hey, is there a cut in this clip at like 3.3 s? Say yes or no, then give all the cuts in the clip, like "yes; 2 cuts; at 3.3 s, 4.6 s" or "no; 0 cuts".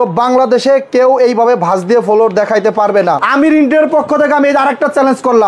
yes; 1 cut; at 3.3 s